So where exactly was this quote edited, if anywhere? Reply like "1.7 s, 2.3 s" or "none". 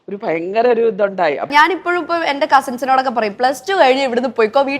1.5 s